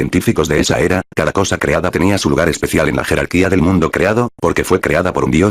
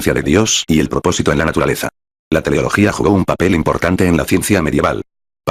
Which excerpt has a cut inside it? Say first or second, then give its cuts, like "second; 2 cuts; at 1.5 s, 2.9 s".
second; 1 cut; at 2.1 s